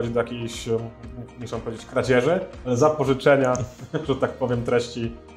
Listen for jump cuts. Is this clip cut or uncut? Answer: uncut